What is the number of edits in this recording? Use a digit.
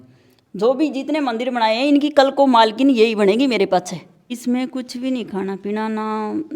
1